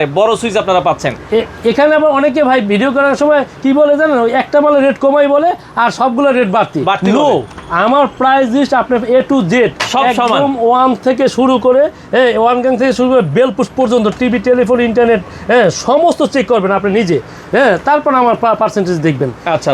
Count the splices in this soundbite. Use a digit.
0